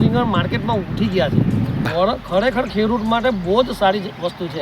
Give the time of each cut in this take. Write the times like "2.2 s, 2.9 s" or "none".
1.9 s